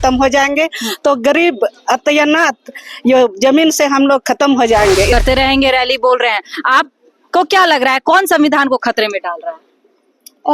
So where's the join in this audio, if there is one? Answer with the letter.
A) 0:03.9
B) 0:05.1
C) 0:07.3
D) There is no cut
B